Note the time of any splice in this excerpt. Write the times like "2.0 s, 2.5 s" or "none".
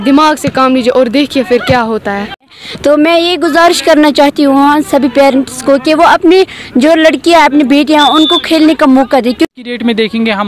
2.5 s, 9.5 s